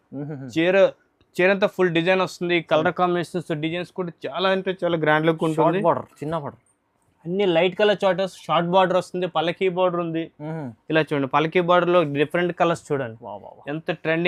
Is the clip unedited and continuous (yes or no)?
yes